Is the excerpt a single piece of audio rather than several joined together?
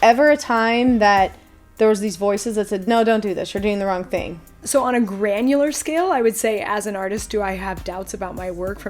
no; 1 cut; at 4.6 s

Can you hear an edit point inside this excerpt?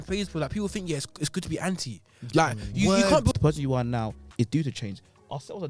yes; 1 cut; at 3.3 s

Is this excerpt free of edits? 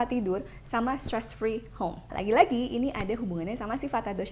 no; 1 cut; at 2.0 s

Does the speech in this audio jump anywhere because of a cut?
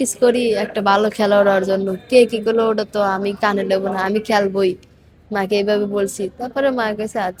no; 0 cuts

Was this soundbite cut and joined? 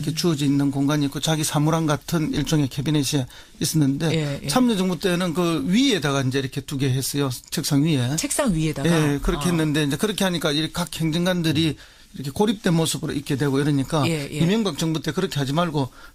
no; 0 cuts

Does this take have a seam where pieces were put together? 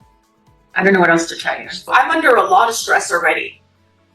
yes; 1 cut; at 1.9 s

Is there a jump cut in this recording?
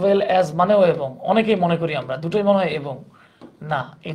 no; 0 cuts

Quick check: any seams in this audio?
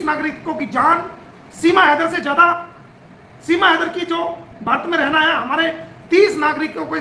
no; 0 cuts

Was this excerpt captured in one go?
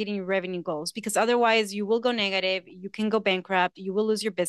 yes; 0 cuts

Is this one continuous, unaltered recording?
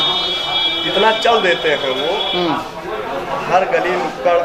yes; 0 cuts

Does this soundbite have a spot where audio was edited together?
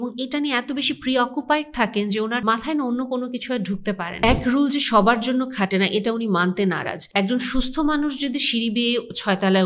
yes; 3 cuts; at 2.6 s, 4.2 s, 7.3 s

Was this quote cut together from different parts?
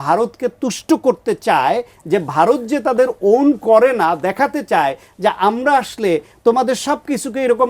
no; 0 cuts

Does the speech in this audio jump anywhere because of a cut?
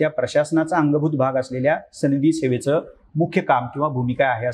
no; 0 cuts

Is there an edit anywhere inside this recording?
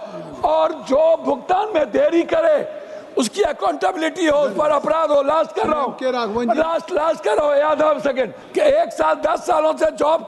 yes; 1 cut; at 8.4 s

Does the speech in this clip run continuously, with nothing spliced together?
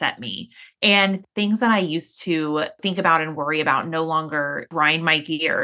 no; 3 cuts; at 1.2 s, 2.8 s, 4.7 s

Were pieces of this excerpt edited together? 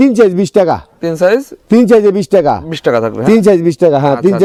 no; 0 cuts

